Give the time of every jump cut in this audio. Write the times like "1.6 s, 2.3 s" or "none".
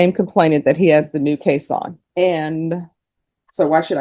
2.0 s